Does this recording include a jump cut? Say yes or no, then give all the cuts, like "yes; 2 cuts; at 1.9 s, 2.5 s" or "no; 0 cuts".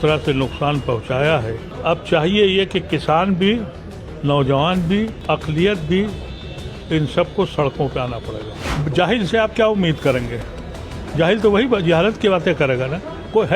yes; 3 cuts; at 1.7 s, 5.2 s, 8.7 s